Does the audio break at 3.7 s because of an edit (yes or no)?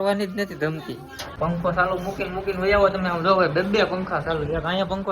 no